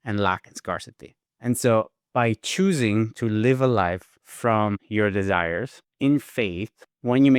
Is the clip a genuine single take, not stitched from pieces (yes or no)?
yes